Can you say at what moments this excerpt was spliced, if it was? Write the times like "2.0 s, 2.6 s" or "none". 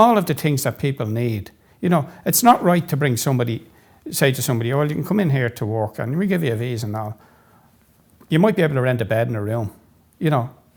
none